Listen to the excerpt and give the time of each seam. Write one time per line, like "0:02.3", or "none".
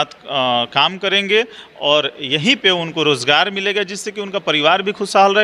none